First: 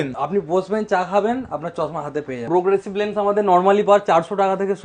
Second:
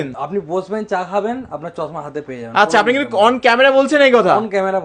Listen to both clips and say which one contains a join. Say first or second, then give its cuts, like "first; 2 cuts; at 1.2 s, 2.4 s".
first; 1 cut; at 2.4 s